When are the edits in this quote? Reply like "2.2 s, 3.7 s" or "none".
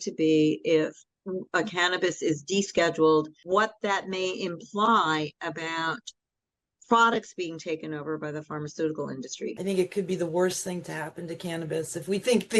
3.4 s, 9.6 s